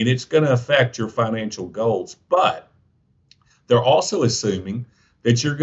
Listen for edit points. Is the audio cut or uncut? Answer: uncut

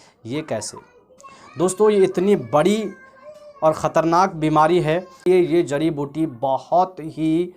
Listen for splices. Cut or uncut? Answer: cut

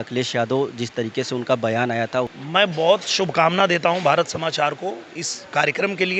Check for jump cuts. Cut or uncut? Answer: cut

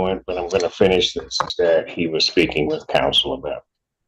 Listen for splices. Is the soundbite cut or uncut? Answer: cut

